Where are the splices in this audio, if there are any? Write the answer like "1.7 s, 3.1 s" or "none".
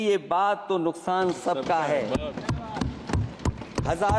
none